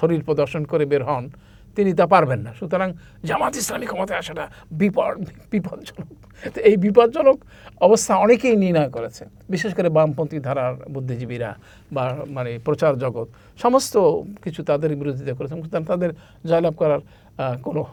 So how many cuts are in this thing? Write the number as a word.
zero